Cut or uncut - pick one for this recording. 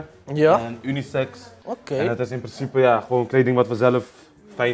uncut